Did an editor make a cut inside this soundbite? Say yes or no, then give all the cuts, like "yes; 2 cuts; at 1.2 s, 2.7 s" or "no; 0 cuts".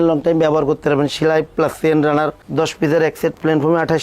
no; 0 cuts